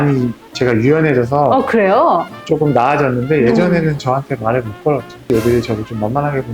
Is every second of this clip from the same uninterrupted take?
no; 1 cut; at 5.3 s

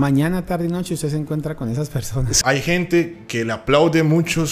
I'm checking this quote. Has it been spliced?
yes; 1 cut; at 2.4 s

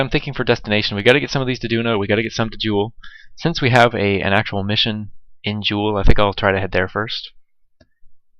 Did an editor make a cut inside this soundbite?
no; 0 cuts

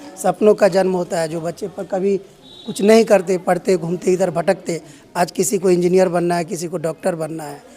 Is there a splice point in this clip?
no; 0 cuts

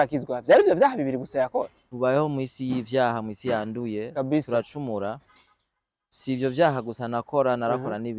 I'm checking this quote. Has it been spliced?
yes; 1 cut; at 1.8 s

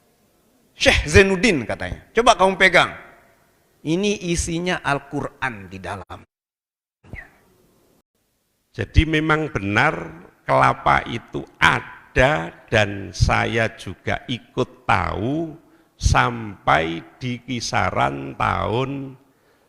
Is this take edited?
yes; 1 cut; at 8.0 s

